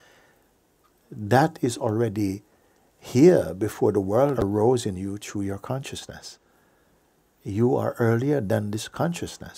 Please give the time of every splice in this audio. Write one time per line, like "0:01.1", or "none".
0:04.4